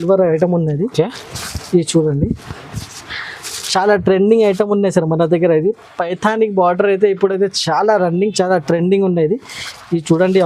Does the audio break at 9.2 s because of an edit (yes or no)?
no